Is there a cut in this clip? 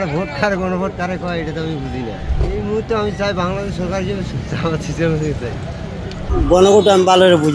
no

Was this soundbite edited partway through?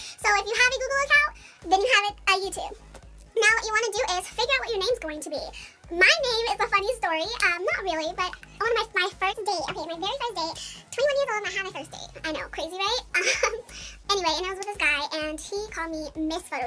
no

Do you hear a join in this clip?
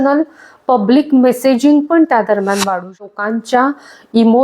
yes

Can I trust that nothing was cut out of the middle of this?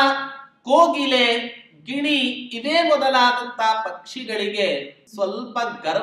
no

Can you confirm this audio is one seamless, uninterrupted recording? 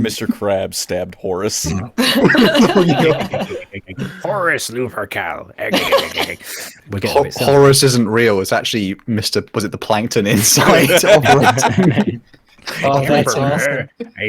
no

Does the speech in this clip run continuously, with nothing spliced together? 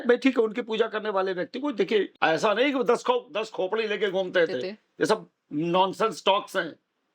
no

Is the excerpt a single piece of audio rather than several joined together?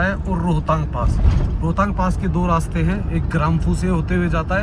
yes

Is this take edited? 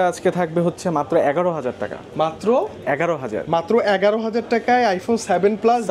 no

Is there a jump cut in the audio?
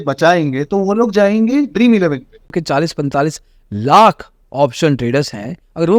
yes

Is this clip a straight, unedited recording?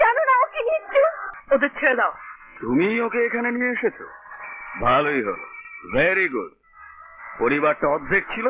no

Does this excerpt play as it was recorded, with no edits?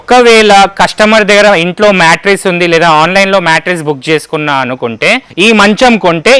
no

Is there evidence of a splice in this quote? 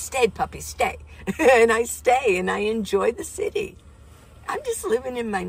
no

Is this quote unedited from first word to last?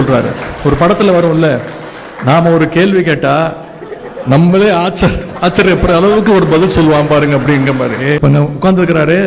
no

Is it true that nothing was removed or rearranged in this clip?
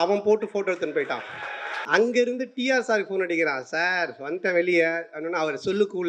no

